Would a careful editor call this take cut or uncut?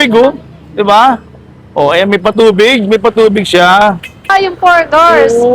cut